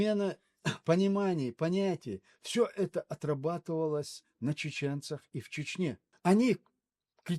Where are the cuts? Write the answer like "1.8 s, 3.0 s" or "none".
6.1 s